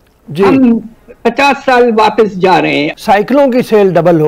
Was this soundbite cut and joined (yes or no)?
yes